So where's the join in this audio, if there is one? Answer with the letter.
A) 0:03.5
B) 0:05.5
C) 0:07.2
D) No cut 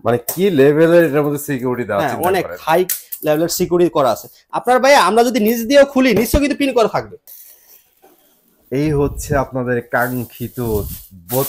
C